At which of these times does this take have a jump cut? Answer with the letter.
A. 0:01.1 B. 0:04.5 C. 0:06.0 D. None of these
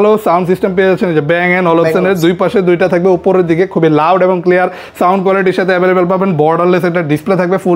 D